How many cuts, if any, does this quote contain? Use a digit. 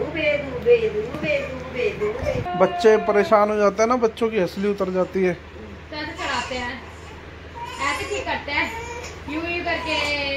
1